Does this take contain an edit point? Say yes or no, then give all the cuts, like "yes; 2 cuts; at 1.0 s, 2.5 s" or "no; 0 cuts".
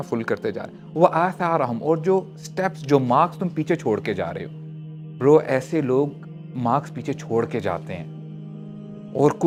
no; 0 cuts